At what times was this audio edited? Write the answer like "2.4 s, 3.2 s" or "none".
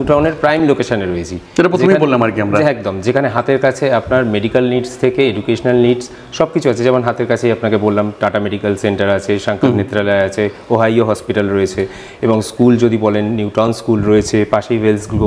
none